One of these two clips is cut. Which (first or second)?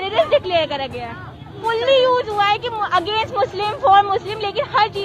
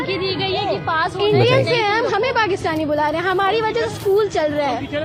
first